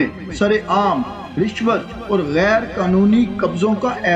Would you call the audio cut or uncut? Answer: uncut